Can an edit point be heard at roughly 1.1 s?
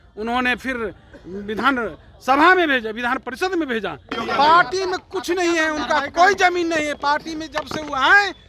no; 1 cut; at 4.2 s

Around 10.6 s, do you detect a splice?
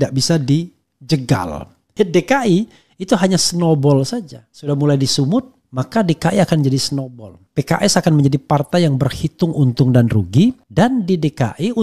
yes; 2 cuts; at 1.9 s, 10.6 s

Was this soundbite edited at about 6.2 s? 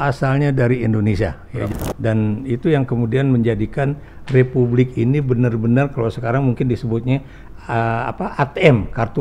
no; 1 cut; at 1.7 s

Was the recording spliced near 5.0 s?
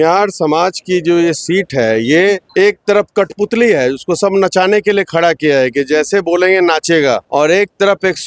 no; 2 cuts; at 2.5 s, 7.2 s

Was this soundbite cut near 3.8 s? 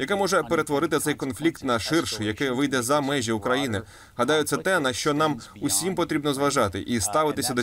no; 0 cuts

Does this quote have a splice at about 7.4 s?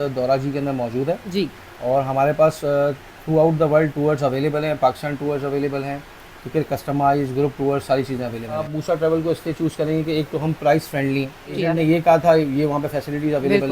no; 2 cuts; at 8.7 s, 11.6 s

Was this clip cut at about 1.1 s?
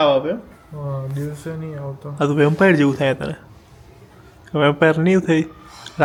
no; 0 cuts

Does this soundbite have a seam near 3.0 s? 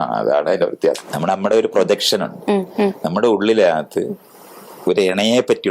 no; 1 cut; at 1.1 s

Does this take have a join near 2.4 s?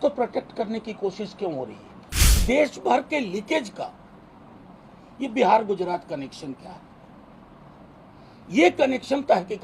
yes; 1 cut; at 2.4 s

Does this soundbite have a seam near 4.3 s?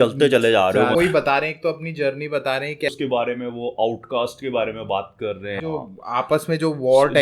no; 3 cuts; at 0.9 s, 2.9 s, 5.6 s

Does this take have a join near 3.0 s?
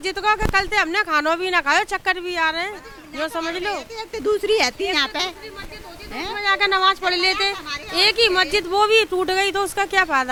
no; 0 cuts

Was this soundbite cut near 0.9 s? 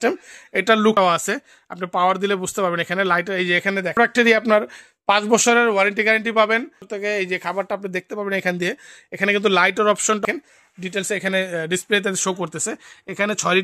yes; 4 cuts; at 0.9 s, 4.0 s, 6.9 s, 10.2 s

